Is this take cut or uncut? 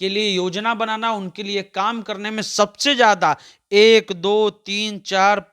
uncut